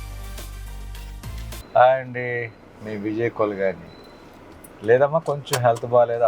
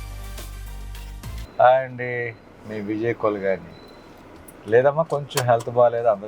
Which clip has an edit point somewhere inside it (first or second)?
second